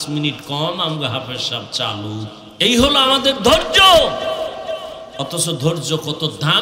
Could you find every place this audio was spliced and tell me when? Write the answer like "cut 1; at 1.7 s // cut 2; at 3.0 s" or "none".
cut 1; at 2.4 s

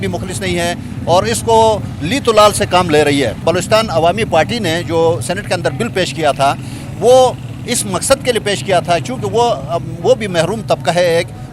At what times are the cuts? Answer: cut 1; at 3.4 s

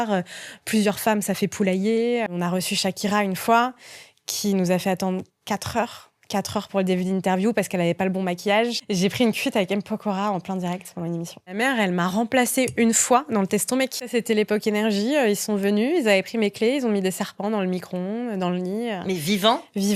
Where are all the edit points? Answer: cut 1; at 2.3 s // cut 2; at 8.8 s // cut 3; at 11.5 s // cut 4; at 14.1 s

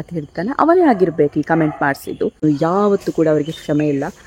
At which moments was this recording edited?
cut 1; at 2.4 s

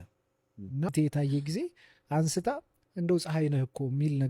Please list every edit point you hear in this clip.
cut 1; at 0.9 s

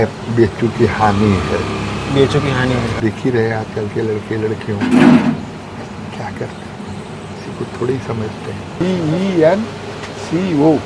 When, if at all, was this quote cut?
cut 1; at 3.0 s // cut 2; at 8.8 s

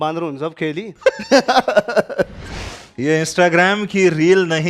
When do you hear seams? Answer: cut 1; at 2.4 s

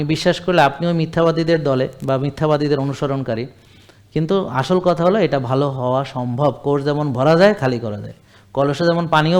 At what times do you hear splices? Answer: none

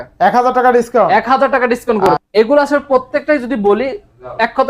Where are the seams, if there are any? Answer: cut 1; at 2.1 s

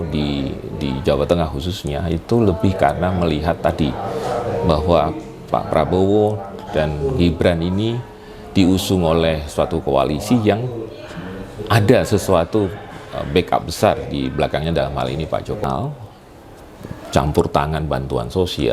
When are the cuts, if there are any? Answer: cut 1; at 15.7 s

